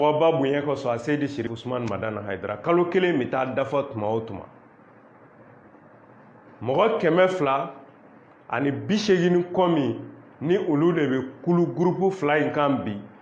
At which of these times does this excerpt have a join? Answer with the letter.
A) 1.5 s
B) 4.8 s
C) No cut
A